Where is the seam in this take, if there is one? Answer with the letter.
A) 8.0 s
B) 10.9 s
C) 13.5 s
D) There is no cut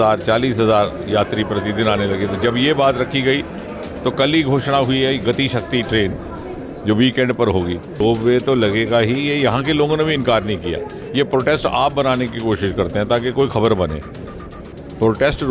A